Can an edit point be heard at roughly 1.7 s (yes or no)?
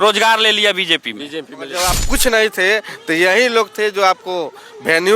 yes